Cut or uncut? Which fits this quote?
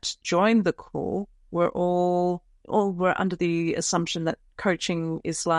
cut